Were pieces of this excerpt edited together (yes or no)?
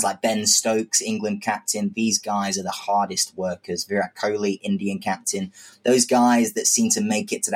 no